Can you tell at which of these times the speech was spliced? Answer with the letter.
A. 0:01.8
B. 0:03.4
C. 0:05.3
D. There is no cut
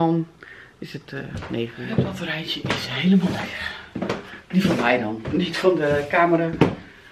A